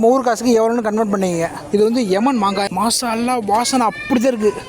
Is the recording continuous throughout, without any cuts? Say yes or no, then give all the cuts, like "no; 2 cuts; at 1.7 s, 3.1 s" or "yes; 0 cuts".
no; 2 cuts; at 1.6 s, 2.7 s